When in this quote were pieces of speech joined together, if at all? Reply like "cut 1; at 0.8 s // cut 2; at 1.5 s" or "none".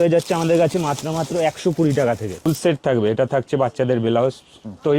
cut 1; at 2.5 s